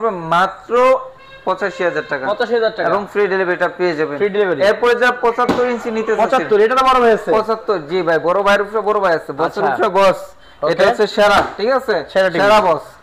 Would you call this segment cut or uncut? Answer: uncut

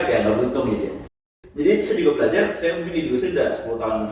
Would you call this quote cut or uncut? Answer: cut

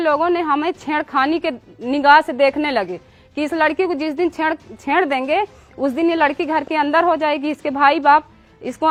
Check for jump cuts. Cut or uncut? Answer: uncut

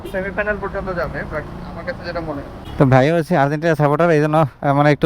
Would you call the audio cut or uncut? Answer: cut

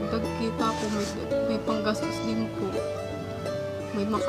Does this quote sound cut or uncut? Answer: uncut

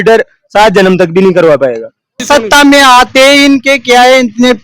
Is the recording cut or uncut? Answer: cut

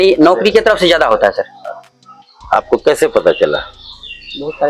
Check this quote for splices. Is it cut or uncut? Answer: uncut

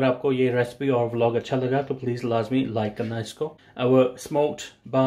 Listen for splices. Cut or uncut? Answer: cut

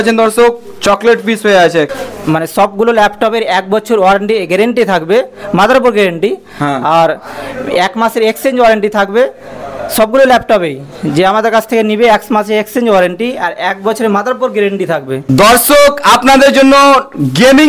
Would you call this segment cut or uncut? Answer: cut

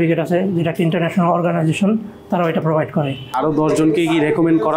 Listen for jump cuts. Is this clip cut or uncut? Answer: cut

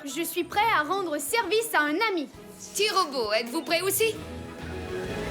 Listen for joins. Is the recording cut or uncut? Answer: cut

